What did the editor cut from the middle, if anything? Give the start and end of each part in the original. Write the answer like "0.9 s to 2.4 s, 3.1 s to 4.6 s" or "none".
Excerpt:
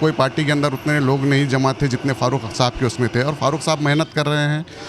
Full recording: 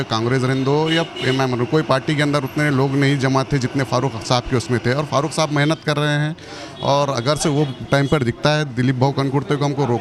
none